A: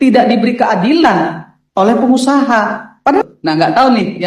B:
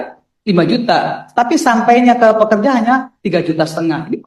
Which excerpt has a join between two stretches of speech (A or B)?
A